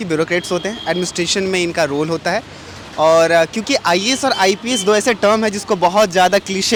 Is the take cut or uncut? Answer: uncut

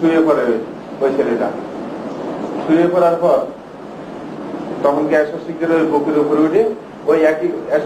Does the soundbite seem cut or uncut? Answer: uncut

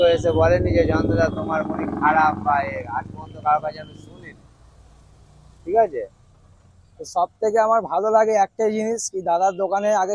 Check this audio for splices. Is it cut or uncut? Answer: uncut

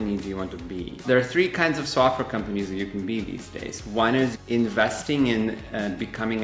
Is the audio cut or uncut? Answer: cut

